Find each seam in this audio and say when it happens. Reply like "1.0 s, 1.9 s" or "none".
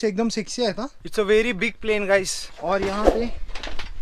1.0 s